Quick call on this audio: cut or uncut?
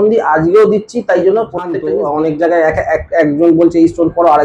cut